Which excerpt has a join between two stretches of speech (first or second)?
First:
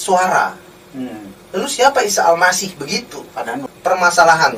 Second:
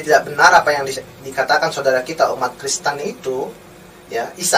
first